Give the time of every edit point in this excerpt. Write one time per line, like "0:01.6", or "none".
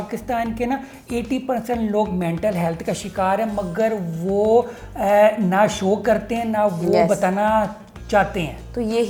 none